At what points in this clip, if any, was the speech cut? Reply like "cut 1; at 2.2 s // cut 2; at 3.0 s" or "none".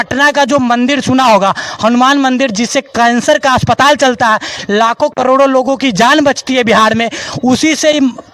none

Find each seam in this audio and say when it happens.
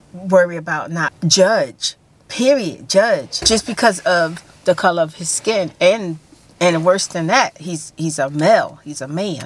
cut 1; at 1.0 s // cut 2; at 3.3 s

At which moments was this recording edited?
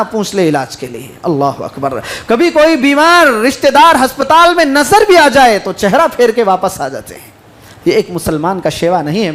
none

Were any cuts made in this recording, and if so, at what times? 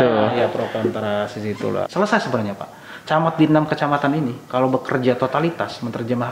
cut 1; at 1.9 s

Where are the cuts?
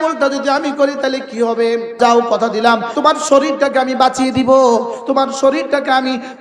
cut 1; at 2.0 s // cut 2; at 2.9 s

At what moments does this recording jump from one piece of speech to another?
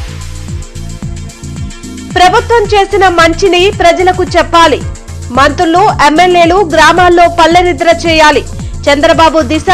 cut 1; at 1.2 s

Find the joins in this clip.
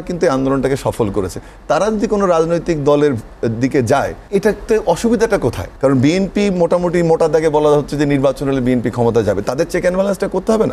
cut 1; at 4.2 s // cut 2; at 5.7 s

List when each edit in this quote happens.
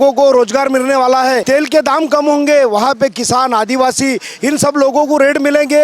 cut 1; at 1.4 s

